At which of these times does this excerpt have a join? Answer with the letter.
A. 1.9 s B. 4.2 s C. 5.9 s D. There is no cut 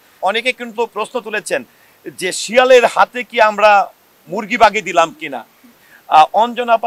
C